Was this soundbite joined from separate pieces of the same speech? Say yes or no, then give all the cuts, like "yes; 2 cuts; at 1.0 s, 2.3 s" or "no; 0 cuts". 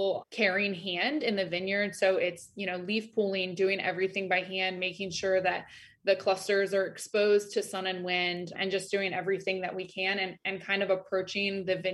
no; 0 cuts